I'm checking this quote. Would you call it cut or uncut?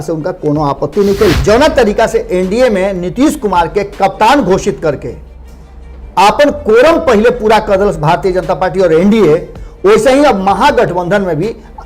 cut